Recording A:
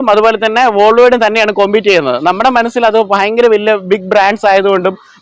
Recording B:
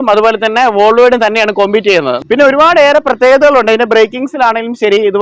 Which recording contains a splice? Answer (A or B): B